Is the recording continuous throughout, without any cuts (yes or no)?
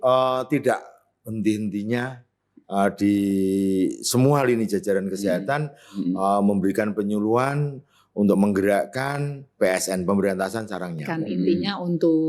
no